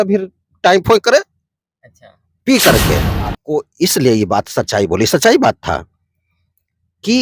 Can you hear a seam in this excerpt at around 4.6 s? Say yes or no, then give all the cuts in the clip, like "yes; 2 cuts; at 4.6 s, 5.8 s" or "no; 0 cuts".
no; 1 cut; at 3.4 s